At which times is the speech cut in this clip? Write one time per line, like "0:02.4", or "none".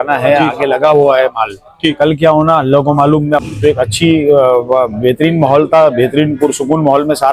0:03.5